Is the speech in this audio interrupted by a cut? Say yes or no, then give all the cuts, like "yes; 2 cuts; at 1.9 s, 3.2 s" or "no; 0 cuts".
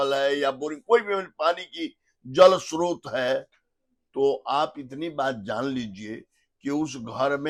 no; 0 cuts